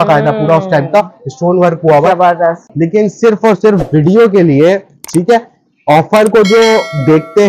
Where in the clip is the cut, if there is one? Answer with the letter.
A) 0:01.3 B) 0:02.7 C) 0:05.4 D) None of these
B